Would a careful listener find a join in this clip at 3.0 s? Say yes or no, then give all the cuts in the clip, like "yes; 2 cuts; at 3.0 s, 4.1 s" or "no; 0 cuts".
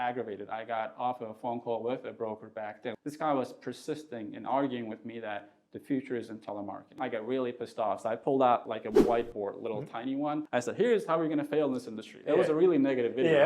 yes; 2 cuts; at 3.0 s, 6.9 s